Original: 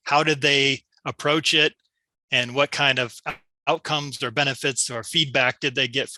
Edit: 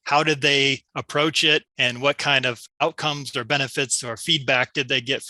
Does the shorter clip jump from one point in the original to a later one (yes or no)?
yes